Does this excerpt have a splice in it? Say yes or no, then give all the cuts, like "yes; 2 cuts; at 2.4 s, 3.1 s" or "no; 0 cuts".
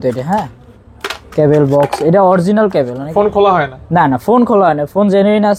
yes; 1 cut; at 3.1 s